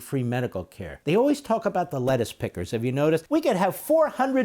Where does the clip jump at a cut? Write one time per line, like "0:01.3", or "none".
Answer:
0:00.9
0:03.2